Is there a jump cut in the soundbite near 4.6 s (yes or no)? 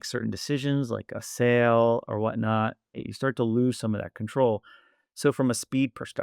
no